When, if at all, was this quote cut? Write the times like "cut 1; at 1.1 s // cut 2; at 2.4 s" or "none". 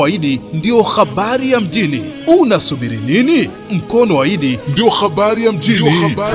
none

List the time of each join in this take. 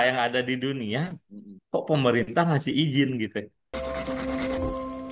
cut 1; at 3.7 s

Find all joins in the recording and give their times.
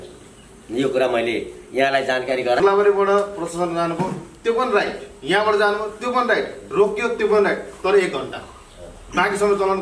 cut 1; at 2.6 s

